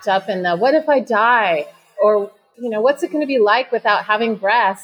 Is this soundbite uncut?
no; 1 cut; at 2.4 s

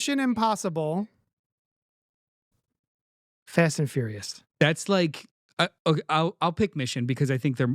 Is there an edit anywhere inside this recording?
yes; 1 cut; at 4.6 s

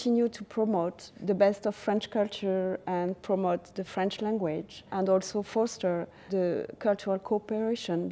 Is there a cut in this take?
yes; 3 cuts; at 1.1 s, 4.8 s, 6.2 s

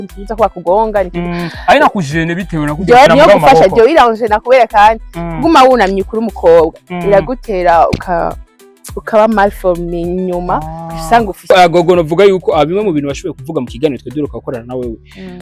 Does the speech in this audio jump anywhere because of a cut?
yes; 2 cuts; at 3.1 s, 11.4 s

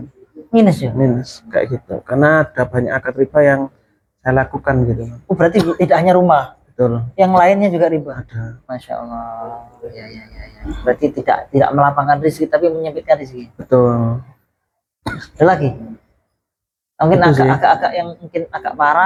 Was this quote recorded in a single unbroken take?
yes; 0 cuts

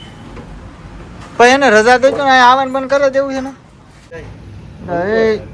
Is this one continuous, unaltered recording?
no; 1 cut; at 4.1 s

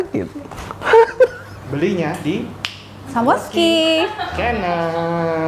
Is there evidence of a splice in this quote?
yes; 1 cut; at 1.5 s

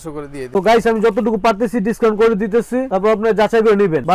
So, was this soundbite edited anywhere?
no; 0 cuts

